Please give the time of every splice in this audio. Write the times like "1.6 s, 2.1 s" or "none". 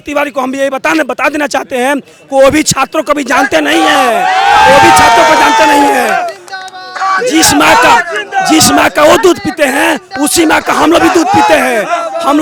none

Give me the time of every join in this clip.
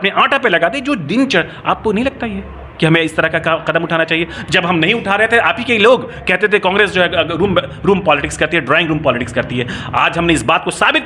none

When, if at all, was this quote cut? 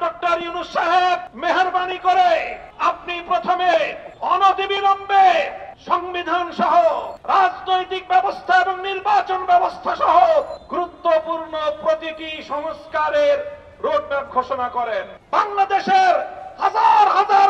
15.1 s

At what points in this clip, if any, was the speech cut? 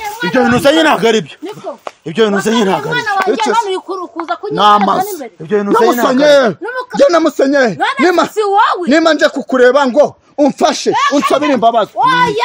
none

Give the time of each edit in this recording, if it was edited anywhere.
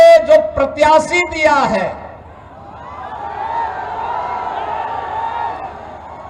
none

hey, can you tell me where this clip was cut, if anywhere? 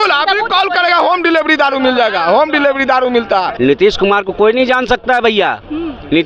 3.5 s

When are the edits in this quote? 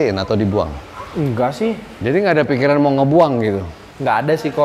1.9 s

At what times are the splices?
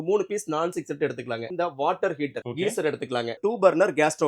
1.5 s, 2.4 s, 3.4 s

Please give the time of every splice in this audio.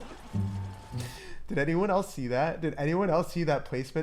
1.1 s

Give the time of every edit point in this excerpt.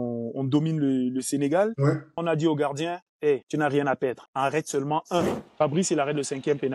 2.2 s, 3.5 s, 4.2 s, 5.4 s

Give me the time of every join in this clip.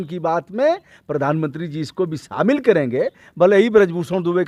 none

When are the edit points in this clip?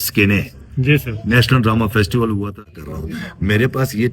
2.6 s

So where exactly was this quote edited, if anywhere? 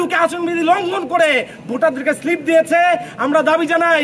none

